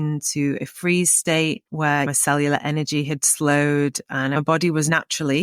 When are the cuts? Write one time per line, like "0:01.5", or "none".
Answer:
0:02.1
0:04.4